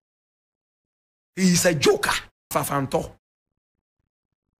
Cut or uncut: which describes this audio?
cut